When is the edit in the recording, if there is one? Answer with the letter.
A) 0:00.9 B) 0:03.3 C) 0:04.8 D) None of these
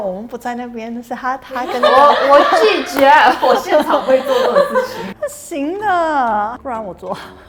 D